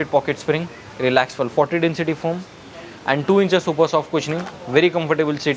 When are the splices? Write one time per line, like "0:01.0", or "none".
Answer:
none